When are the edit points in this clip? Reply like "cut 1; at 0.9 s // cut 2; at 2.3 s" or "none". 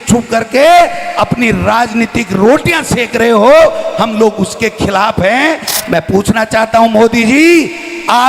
cut 1; at 5.7 s